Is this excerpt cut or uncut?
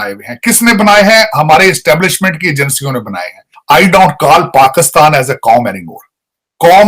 cut